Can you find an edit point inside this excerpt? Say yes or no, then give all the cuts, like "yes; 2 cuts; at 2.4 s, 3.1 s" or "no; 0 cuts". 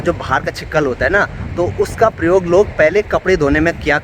no; 0 cuts